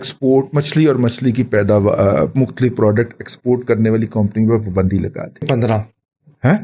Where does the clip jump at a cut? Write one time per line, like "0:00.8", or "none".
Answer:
0:05.5